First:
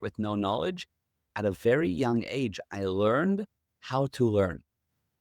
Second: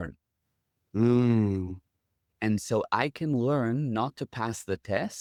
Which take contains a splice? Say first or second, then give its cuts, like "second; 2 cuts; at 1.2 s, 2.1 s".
first; 1 cut; at 1.3 s